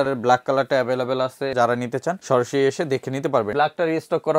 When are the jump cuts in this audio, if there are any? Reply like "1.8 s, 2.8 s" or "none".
1.9 s, 3.5 s